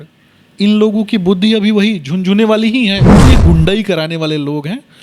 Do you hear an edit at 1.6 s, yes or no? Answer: no